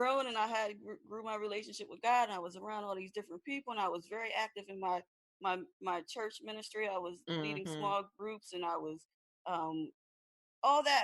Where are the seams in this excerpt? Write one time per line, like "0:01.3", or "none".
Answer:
none